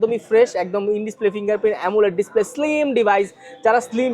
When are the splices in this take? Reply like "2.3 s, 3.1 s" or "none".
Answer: none

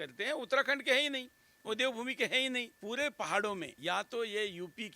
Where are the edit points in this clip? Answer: 2.7 s, 3.7 s

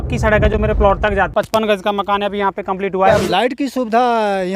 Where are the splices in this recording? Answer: 1.3 s, 3.2 s

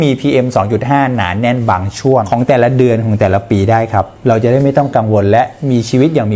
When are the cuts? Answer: 2.3 s

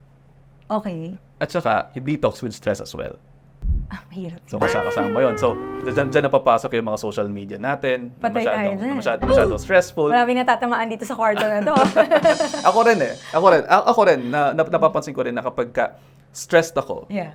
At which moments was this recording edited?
none

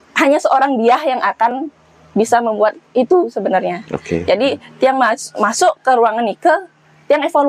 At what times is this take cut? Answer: none

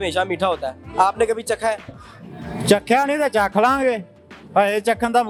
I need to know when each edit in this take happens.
none

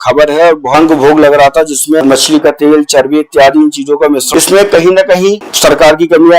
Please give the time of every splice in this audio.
0.7 s, 2.0 s, 4.2 s, 5.5 s

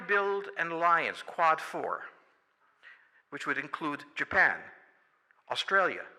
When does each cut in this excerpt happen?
none

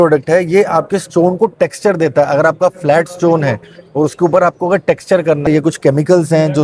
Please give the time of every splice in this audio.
5.4 s

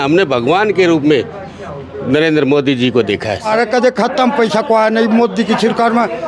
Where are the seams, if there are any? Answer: 3.5 s

